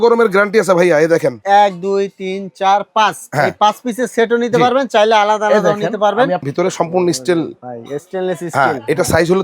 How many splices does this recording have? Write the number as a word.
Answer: two